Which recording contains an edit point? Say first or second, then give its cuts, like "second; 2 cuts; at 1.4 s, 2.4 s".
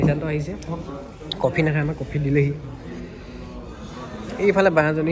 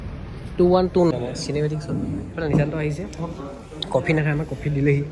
second; 1 cut; at 1.1 s